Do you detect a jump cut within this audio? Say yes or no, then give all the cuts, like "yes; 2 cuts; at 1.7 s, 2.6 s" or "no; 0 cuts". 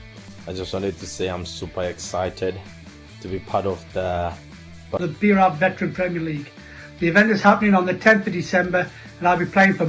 yes; 1 cut; at 5.0 s